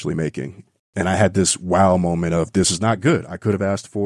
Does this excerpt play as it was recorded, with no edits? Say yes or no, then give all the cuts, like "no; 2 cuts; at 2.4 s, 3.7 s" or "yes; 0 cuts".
no; 2 cuts; at 0.8 s, 2.7 s